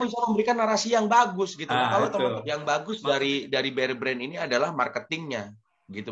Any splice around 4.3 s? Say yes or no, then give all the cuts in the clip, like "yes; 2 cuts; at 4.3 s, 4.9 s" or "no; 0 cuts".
no; 1 cut; at 2.5 s